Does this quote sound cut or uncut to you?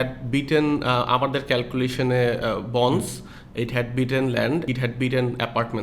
cut